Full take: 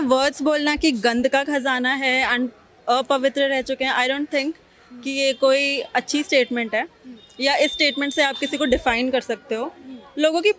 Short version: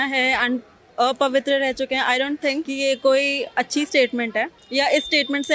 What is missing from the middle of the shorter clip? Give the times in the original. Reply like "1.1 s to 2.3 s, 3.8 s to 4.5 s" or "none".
4.6 s to 5.1 s, 7.0 s to 7.3 s